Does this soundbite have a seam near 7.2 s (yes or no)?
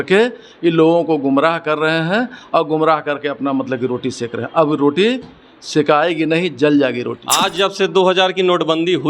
yes